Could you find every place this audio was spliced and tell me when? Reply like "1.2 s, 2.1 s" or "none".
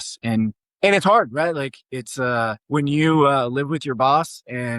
2.6 s